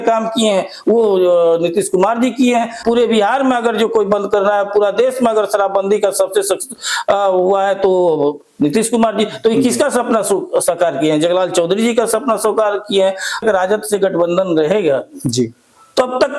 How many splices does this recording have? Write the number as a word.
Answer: two